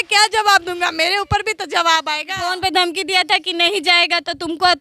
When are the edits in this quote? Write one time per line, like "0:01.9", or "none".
0:02.4